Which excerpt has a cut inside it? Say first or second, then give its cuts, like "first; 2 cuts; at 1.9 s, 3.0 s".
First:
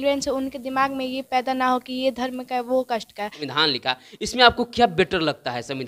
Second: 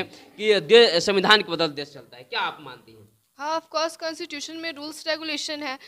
first; 1 cut; at 3.4 s